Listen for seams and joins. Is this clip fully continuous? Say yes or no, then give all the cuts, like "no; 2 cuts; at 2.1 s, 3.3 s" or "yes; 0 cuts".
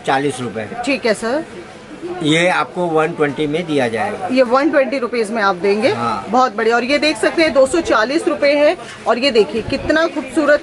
yes; 0 cuts